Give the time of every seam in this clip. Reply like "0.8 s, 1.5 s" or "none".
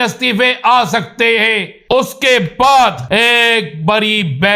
1.9 s, 3.0 s